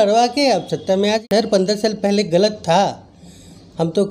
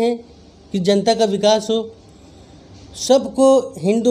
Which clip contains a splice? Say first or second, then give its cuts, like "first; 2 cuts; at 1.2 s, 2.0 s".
first; 1 cut; at 1.2 s